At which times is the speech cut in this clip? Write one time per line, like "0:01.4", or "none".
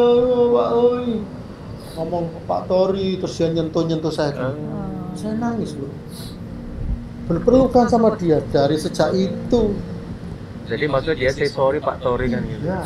none